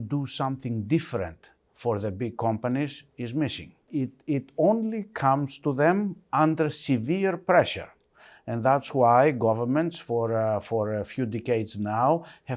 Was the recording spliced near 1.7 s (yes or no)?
no